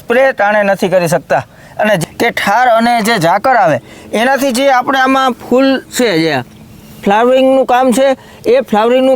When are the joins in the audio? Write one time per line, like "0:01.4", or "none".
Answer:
0:02.0